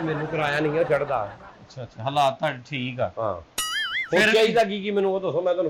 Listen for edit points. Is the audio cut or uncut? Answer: uncut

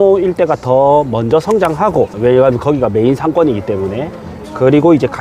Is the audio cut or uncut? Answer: cut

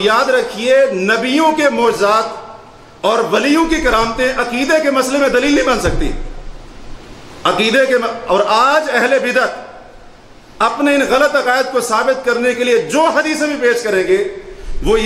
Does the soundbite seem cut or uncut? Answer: uncut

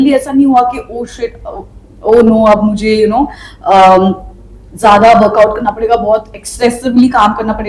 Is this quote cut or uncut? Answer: uncut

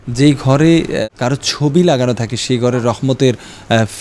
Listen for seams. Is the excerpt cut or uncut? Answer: cut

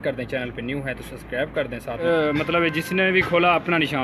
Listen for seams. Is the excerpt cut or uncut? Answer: cut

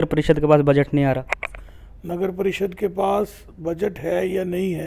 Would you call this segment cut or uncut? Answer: uncut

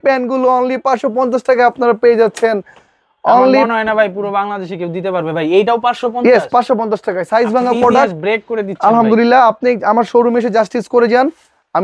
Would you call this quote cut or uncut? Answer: uncut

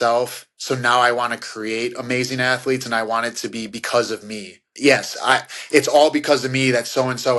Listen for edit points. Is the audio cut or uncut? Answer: uncut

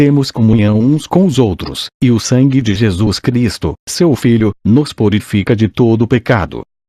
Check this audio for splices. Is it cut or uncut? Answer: cut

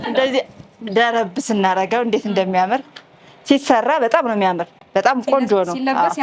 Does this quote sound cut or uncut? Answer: uncut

